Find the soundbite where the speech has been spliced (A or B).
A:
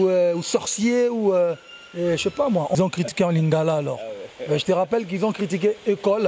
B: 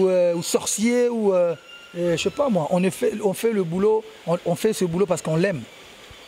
A